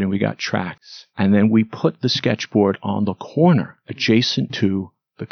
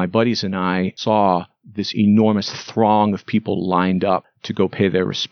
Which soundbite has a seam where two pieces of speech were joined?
second; 2 cuts; at 1.0 s, 4.4 s

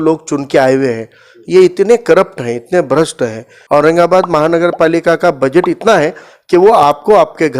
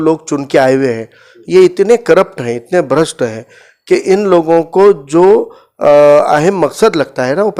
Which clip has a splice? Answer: first; 1 cut; at 3.5 s

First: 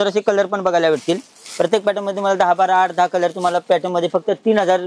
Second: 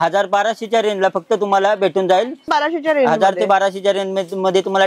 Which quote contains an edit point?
second; 1 cut; at 2.4 s

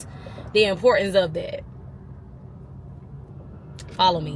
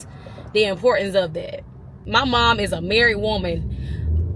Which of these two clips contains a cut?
second; 1 cut; at 2.0 s

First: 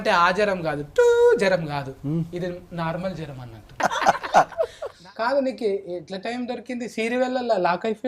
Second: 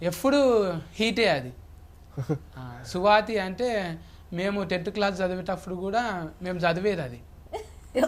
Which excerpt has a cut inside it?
first; 2 cuts; at 3.7 s, 5.0 s

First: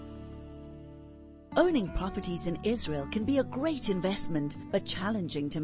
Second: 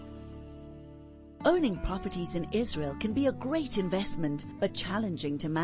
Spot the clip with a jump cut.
second; 1 cut; at 1.3 s

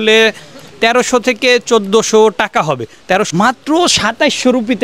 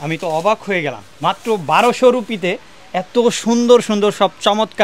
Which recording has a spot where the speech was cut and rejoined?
first; 1 cut; at 3.3 s

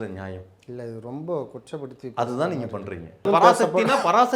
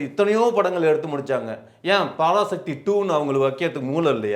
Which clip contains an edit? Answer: first; 1 cut; at 3.2 s

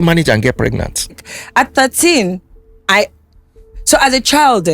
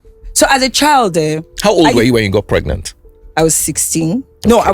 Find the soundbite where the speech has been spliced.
first; 1 cut; at 1.3 s

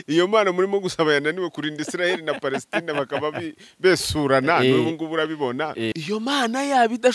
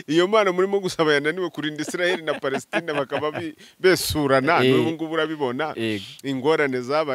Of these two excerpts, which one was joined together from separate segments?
first; 1 cut; at 6.0 s

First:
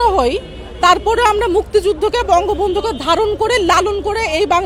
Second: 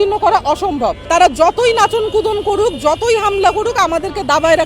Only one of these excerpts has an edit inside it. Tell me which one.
second; 1 cut; at 1.0 s

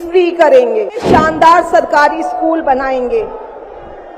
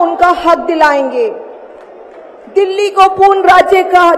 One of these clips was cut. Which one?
first; 1 cut; at 1.0 s

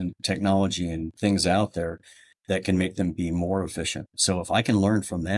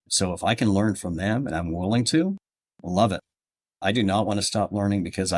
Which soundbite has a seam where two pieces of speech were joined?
second; 1 cut; at 3.8 s

